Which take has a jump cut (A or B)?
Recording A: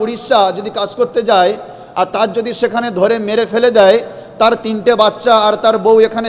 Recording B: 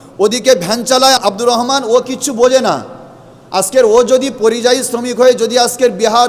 B